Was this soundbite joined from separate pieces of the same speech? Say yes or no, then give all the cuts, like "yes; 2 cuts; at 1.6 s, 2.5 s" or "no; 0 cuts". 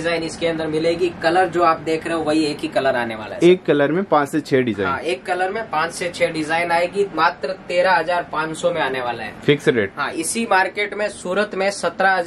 no; 0 cuts